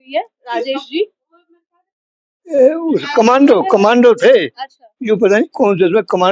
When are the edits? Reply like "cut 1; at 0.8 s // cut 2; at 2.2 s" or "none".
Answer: none